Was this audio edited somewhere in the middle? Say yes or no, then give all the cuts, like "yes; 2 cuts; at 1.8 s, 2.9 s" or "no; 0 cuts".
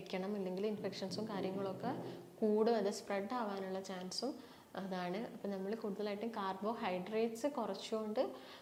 no; 0 cuts